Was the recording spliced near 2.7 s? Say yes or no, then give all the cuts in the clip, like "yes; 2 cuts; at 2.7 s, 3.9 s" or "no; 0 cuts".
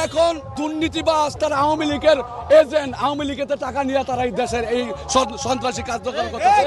no; 1 cut; at 1.3 s